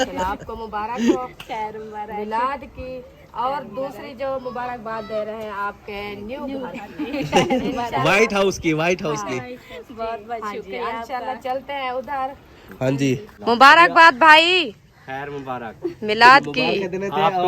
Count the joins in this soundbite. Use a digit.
1